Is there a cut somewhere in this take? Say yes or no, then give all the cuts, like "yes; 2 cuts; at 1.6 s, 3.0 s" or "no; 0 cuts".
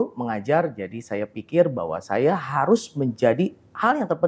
no; 0 cuts